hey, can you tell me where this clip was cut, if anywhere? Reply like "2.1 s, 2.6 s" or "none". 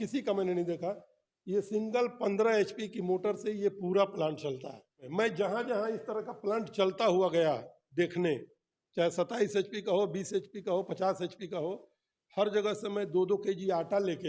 5.1 s